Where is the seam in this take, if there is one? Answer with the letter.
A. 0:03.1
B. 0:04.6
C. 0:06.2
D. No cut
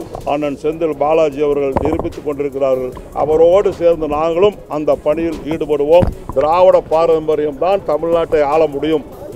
C